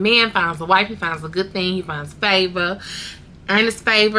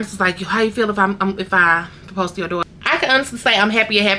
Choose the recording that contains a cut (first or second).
second